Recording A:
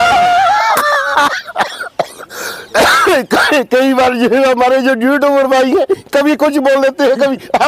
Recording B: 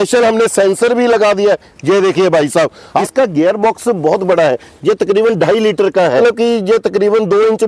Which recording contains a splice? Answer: B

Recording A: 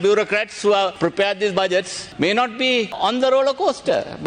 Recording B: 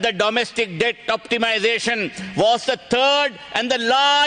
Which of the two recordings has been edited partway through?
A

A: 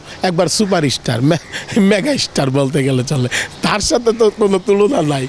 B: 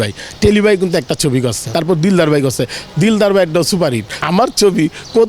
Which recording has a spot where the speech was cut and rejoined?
B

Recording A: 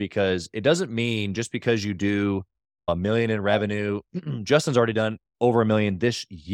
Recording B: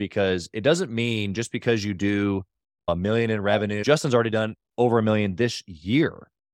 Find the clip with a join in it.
B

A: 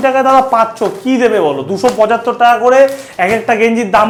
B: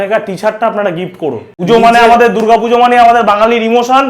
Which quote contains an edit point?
B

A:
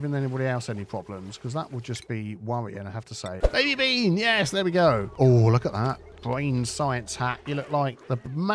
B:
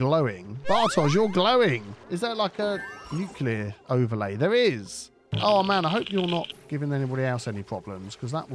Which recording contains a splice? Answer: A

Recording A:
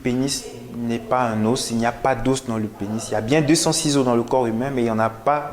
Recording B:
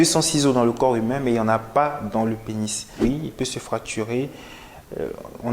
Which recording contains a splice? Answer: B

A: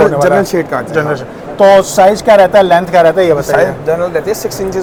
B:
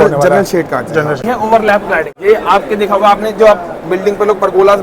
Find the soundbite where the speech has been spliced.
B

